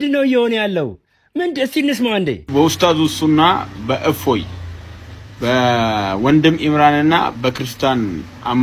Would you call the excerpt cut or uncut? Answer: uncut